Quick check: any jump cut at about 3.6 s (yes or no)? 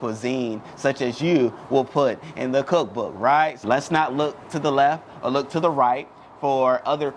yes